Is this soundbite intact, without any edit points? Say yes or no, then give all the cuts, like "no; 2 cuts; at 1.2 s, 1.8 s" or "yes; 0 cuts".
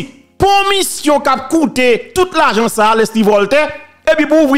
yes; 0 cuts